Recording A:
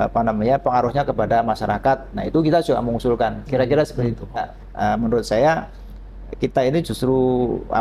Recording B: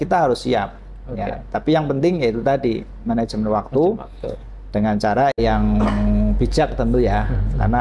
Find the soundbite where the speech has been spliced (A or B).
A